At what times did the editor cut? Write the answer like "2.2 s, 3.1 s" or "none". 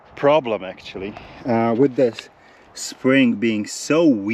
none